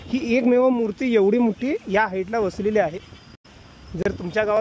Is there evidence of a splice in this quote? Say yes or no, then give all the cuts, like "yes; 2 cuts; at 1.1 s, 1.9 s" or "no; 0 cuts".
no; 0 cuts